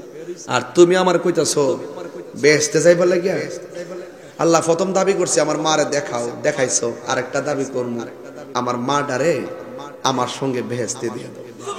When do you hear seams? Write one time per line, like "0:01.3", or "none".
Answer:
none

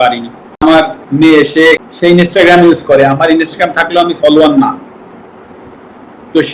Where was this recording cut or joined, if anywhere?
0:00.9
0:01.9

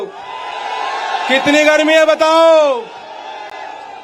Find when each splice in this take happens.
none

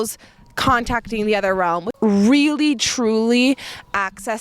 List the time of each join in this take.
0:01.9

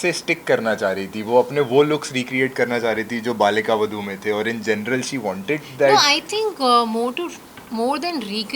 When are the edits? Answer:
none

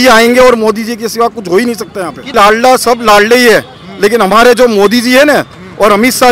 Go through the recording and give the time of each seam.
0:02.3

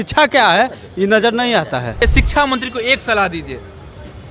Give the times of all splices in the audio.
0:02.0

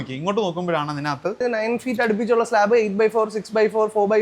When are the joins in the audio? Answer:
0:01.4

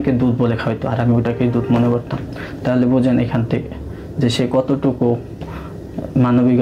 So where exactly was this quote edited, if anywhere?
none

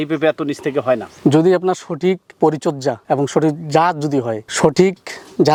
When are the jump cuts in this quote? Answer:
none

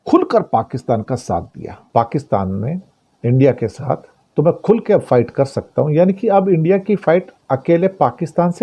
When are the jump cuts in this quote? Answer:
0:01.8
0:04.2

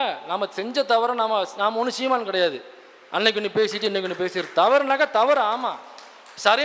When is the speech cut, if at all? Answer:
none

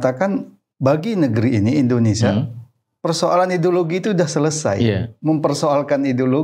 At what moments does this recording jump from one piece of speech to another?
none

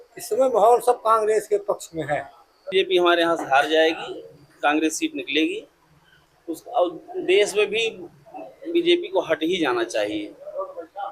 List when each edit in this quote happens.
0:02.6

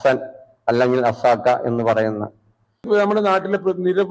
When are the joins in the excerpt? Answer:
0:02.8

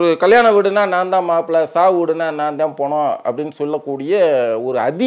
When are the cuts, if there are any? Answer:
none

